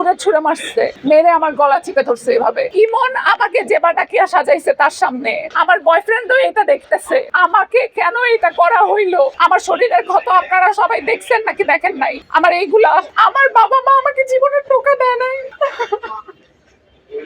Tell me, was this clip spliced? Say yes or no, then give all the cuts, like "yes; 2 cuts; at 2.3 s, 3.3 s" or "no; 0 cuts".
yes; 5 cuts; at 2.7 s, 5.4 s, 7.3 s, 9.3 s, 12.2 s